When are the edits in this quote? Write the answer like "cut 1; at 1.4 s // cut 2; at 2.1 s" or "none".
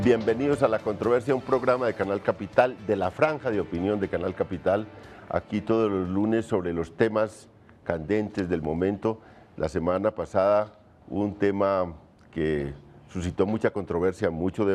cut 1; at 4.8 s